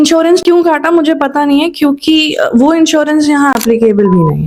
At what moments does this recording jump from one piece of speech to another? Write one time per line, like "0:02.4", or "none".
none